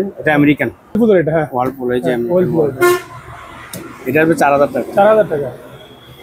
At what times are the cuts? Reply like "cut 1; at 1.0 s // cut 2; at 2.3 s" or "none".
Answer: cut 1; at 1.0 s